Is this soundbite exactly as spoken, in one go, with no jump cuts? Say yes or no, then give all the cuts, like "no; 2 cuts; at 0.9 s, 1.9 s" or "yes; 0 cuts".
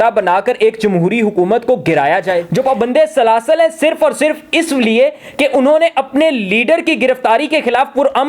no; 1 cut; at 2.5 s